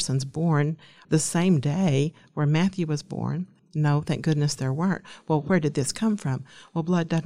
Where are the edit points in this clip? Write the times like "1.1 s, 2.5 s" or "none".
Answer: 0.9 s, 3.6 s